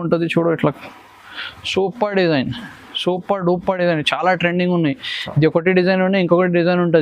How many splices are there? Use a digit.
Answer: 0